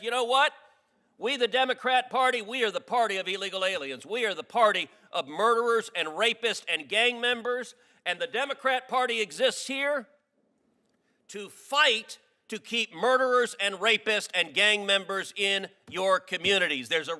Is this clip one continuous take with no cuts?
yes; 0 cuts

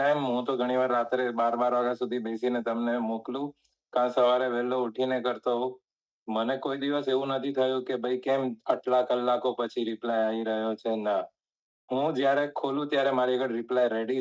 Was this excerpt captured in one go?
yes; 0 cuts

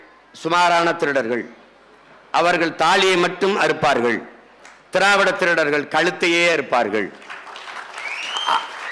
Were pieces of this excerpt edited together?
no; 0 cuts

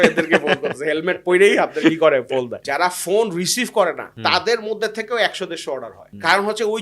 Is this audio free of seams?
no; 2 cuts; at 2.6 s, 4.1 s

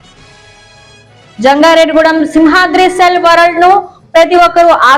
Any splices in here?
yes; 1 cut; at 1.3 s

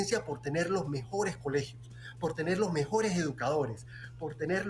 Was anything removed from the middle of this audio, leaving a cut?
no; 0 cuts

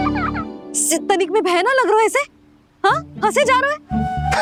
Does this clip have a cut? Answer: no; 0 cuts

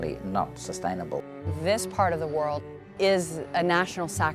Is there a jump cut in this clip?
yes; 2 cuts; at 1.4 s, 2.9 s

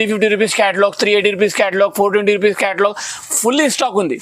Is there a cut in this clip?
no; 0 cuts

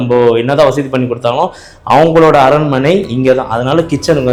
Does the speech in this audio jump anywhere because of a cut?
no; 0 cuts

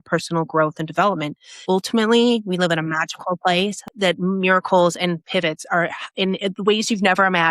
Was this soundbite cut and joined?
yes; 2 cuts; at 1.6 s, 3.9 s

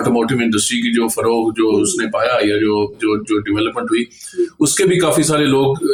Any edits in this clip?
no; 0 cuts

